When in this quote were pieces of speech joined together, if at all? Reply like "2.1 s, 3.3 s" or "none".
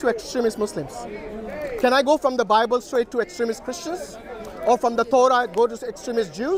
none